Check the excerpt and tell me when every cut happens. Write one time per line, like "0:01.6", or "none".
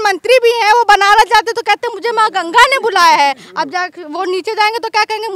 none